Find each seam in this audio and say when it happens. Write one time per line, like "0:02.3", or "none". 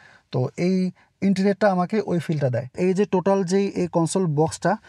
0:02.7